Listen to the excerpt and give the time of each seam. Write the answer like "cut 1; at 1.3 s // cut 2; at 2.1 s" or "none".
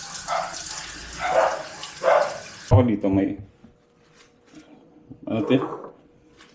cut 1; at 2.7 s